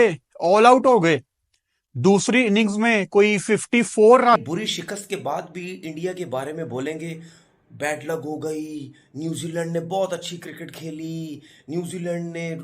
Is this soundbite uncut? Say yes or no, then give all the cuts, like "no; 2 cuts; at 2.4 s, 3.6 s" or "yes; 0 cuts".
no; 1 cut; at 4.4 s